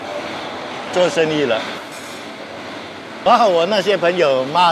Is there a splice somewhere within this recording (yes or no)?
no